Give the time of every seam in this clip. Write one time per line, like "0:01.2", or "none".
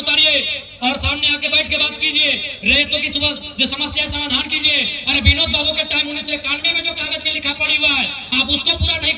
none